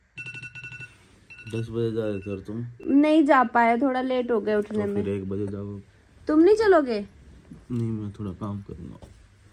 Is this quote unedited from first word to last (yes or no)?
yes